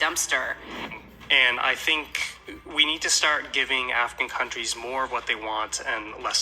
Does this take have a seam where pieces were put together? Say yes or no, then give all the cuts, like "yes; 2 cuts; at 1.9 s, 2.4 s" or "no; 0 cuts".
yes; 1 cut; at 0.9 s